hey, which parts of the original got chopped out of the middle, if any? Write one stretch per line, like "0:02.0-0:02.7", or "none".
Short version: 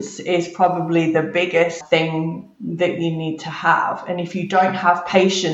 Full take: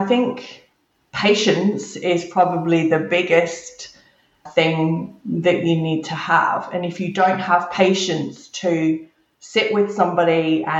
0:03.6-0:04.4